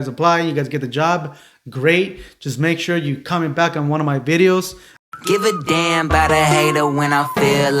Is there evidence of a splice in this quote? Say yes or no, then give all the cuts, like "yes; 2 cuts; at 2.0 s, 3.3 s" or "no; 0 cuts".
yes; 1 cut; at 5.0 s